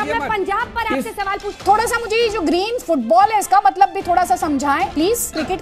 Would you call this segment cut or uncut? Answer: cut